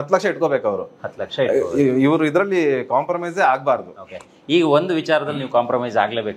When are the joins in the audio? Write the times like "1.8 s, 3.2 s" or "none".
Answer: none